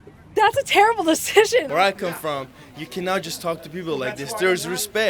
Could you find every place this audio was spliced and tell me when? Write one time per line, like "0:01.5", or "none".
0:01.7

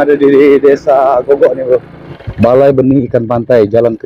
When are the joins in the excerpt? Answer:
0:02.0

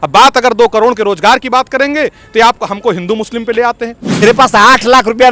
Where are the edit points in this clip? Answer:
0:04.2

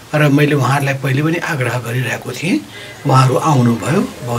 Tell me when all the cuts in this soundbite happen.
none

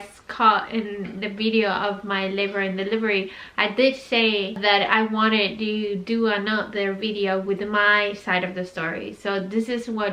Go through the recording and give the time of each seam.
none

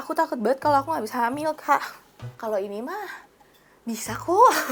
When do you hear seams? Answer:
none

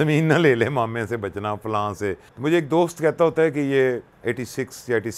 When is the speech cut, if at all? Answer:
0:02.3
0:04.1

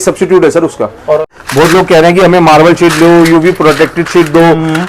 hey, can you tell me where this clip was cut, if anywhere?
0:01.3

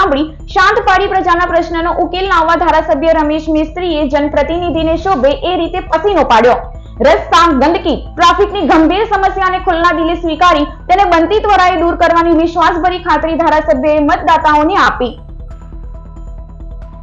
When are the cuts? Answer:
none

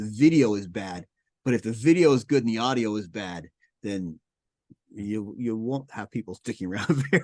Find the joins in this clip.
none

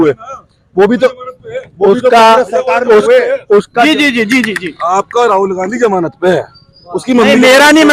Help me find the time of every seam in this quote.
none

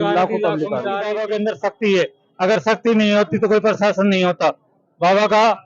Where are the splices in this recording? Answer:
0:01.2

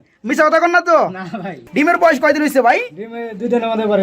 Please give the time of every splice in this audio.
0:01.6

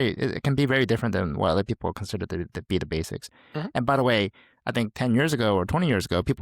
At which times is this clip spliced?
none

